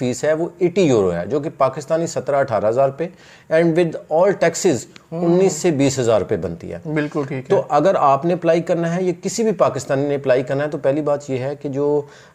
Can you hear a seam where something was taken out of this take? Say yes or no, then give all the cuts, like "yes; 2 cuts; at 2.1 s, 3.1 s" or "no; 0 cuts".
no; 0 cuts